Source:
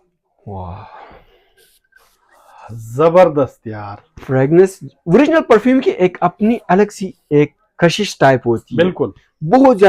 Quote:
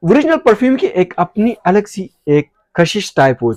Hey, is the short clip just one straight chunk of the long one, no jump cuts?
yes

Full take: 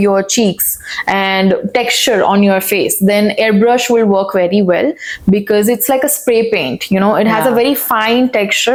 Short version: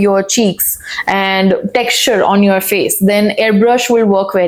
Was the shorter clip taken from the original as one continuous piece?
yes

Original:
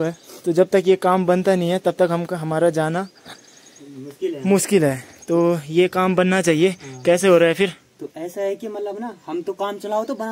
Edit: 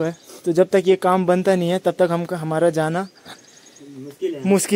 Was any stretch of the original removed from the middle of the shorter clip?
no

